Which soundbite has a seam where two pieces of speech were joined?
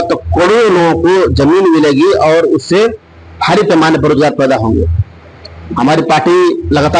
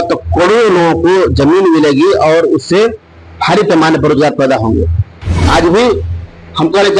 second; 1 cut; at 5.3 s

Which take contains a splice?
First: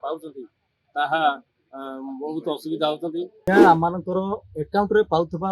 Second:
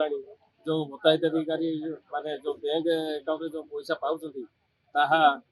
first; 1 cut; at 3.5 s

